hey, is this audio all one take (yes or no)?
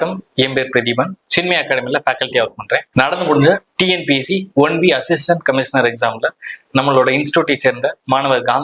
yes